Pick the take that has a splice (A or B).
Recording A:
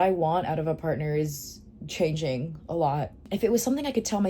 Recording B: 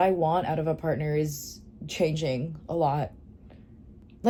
A